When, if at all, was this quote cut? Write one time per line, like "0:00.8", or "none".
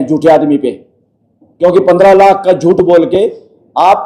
none